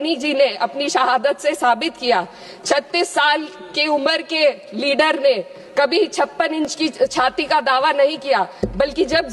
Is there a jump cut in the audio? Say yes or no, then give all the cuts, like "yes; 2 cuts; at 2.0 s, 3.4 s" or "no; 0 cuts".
no; 0 cuts